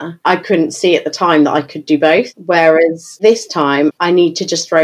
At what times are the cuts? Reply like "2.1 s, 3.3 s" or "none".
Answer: 4.0 s